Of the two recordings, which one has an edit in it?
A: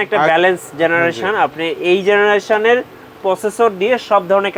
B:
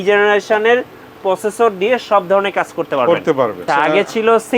B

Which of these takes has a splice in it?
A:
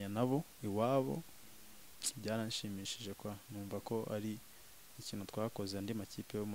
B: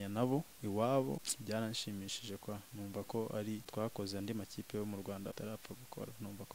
B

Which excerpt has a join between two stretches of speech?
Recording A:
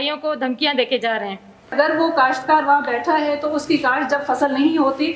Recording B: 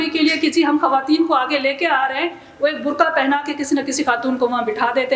A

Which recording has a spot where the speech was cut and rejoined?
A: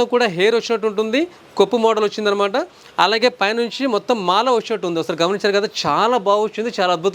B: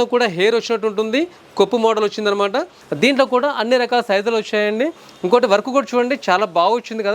B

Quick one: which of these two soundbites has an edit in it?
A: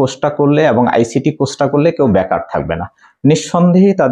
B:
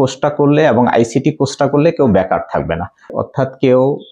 B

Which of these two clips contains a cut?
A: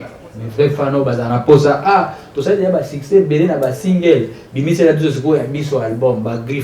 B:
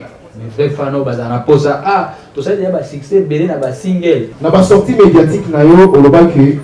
B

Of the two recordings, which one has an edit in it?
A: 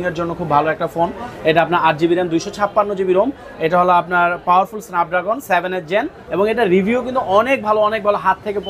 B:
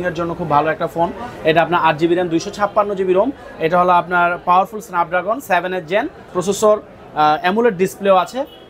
A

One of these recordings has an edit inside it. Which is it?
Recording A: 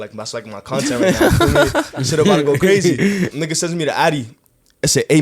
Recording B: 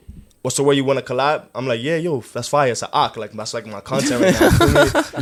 A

